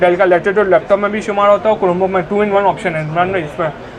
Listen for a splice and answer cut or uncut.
uncut